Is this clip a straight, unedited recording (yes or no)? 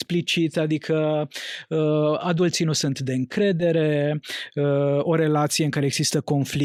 yes